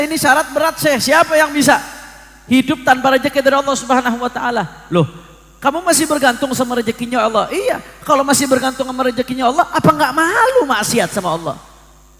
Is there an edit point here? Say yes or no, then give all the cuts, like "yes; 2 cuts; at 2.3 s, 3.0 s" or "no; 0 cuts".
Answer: no; 0 cuts